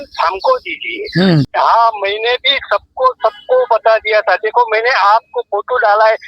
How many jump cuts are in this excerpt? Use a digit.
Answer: 1